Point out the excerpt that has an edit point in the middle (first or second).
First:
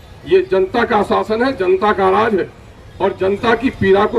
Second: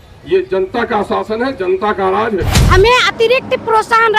second